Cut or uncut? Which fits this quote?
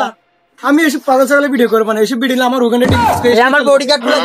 uncut